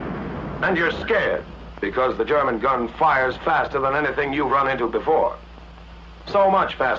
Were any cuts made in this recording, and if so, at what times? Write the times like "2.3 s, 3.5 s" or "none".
2.3 s